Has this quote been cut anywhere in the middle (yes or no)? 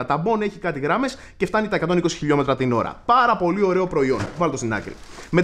no